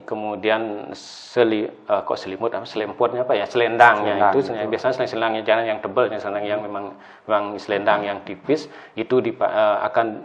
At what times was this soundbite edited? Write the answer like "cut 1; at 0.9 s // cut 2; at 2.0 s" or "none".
none